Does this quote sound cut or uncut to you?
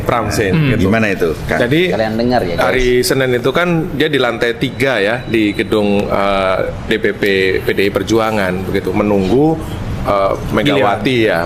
uncut